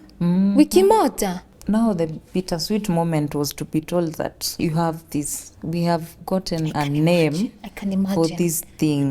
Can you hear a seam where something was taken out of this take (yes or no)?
yes